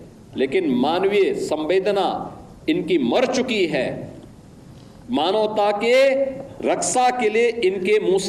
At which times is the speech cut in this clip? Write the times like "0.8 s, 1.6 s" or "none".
none